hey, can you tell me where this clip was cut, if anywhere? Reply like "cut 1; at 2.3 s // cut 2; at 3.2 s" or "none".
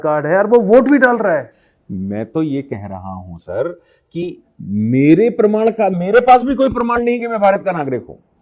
none